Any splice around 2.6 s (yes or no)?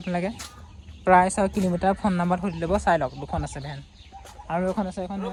no